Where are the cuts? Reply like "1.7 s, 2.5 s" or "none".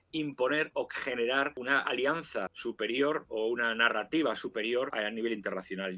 1.6 s, 2.5 s, 4.9 s